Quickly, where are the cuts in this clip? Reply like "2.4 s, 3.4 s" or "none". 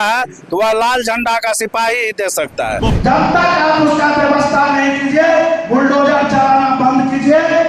2.9 s